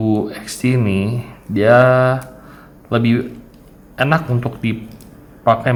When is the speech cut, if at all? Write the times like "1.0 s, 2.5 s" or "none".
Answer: none